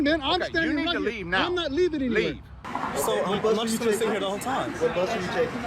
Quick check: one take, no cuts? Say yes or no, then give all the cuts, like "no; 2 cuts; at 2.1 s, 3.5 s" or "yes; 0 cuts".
no; 1 cut; at 2.6 s